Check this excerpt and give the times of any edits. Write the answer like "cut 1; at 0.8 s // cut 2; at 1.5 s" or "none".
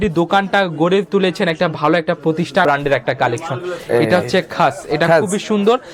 cut 1; at 2.6 s